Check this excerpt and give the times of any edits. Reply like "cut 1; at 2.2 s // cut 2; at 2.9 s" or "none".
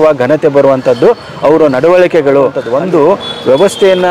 cut 1; at 2.6 s

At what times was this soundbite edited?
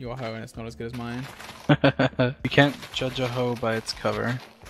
none

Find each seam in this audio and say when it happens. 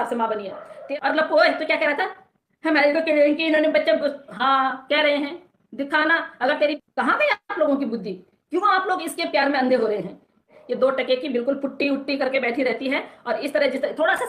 cut 1; at 0.8 s // cut 2; at 6.8 s // cut 3; at 10.6 s

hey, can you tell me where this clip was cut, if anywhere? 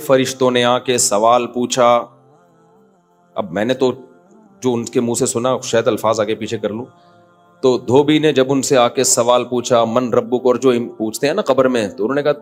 none

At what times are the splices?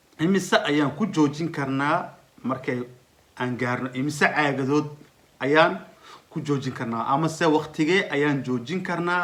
none

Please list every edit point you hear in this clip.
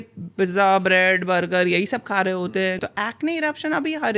cut 1; at 2.8 s

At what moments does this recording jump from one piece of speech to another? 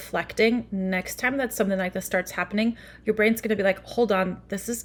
none

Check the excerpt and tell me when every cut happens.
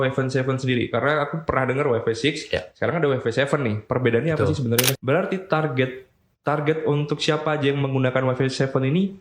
cut 1; at 5.0 s

